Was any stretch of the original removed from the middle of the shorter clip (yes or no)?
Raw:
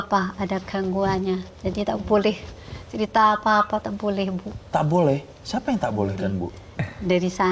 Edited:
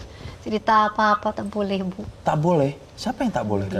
no